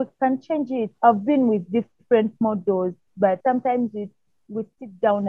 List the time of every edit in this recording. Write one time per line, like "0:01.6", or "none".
0:00.9
0:03.4